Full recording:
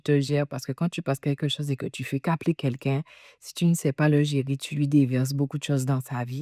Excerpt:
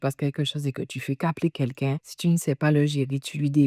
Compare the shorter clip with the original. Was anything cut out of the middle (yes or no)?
yes